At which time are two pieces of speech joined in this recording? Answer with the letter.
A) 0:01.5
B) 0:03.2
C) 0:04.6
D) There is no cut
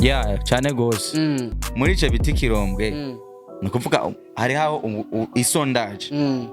A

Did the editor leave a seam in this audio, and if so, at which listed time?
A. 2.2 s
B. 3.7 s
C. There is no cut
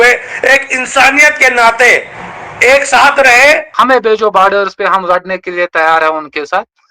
B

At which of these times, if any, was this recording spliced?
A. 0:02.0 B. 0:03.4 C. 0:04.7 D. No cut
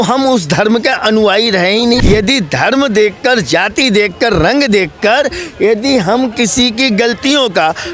A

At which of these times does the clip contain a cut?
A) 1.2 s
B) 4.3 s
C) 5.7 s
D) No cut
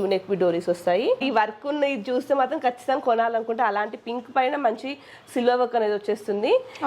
A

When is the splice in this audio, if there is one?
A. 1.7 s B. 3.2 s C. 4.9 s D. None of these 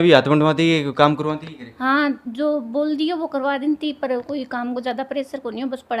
D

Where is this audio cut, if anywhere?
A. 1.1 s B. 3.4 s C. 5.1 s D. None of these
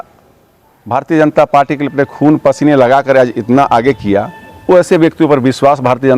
D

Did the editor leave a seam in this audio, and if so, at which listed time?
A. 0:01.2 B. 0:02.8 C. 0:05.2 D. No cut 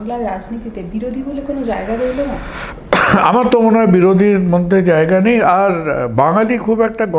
D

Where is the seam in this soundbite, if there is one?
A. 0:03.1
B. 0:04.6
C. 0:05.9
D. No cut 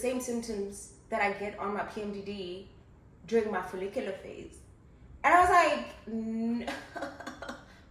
C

